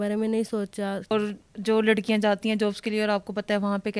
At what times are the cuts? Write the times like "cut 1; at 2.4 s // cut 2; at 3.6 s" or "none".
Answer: cut 1; at 1.0 s